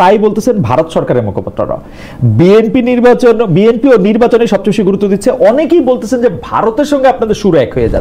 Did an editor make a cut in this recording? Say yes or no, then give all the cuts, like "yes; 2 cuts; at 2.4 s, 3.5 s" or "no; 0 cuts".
no; 0 cuts